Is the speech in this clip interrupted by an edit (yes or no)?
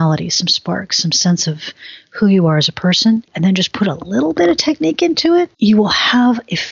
yes